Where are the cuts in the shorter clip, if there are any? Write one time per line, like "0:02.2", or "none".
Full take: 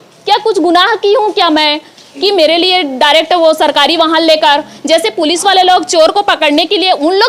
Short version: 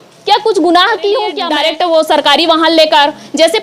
0:01.4